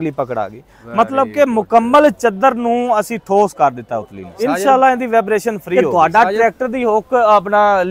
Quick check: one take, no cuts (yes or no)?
no